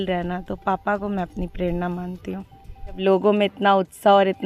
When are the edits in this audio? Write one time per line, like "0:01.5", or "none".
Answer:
0:03.0